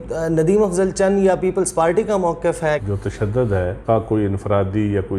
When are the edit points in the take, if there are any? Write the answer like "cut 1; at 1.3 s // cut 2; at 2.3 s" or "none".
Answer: cut 1; at 2.8 s // cut 2; at 3.8 s